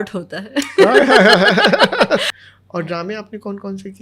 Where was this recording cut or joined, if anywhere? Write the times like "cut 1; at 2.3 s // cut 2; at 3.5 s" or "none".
cut 1; at 2.3 s